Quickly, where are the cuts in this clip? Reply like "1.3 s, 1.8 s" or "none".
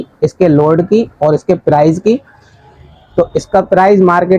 none